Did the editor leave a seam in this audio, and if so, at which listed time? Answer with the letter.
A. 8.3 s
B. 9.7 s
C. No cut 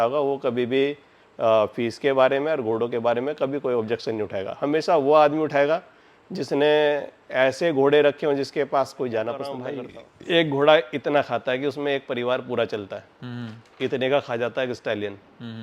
B